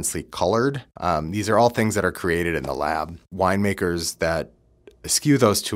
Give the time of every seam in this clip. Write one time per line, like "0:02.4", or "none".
0:00.9
0:03.3